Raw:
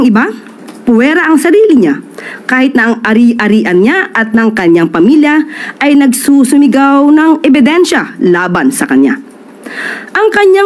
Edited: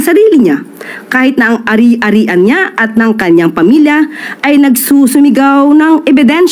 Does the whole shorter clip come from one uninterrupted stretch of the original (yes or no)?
yes